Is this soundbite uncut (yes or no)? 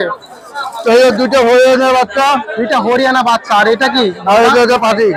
yes